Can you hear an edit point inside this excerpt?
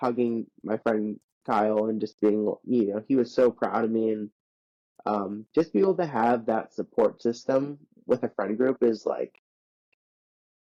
no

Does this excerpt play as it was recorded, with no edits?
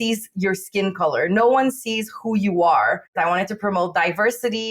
no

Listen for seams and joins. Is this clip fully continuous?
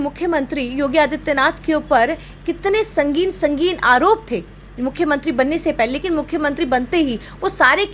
yes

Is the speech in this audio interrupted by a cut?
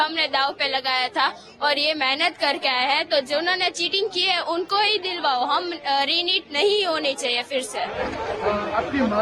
no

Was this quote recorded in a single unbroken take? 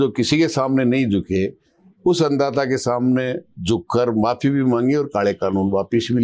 yes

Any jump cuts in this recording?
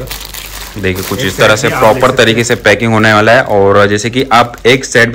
no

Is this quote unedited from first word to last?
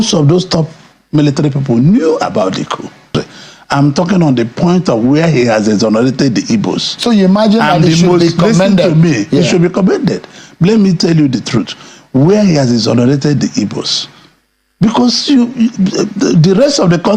no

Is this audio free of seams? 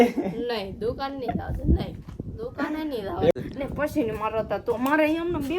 no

